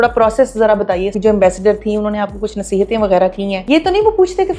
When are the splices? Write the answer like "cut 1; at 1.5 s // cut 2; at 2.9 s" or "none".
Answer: cut 1; at 1.1 s // cut 2; at 3.6 s